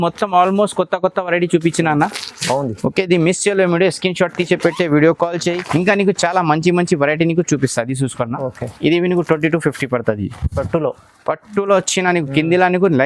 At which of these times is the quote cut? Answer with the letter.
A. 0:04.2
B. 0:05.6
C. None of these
C